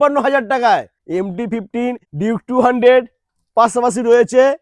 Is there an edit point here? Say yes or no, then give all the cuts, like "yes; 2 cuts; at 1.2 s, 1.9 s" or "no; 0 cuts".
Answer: yes; 2 cuts; at 1.0 s, 2.1 s